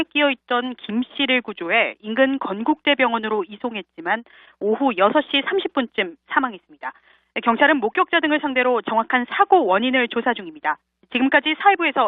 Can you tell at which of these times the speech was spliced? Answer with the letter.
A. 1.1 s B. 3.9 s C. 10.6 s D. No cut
A